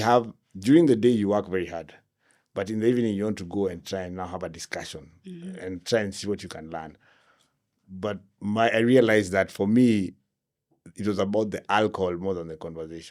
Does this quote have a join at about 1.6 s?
no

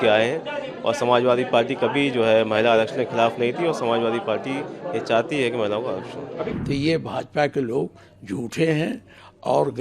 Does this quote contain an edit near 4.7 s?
no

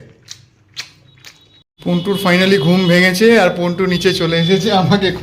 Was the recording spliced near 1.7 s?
yes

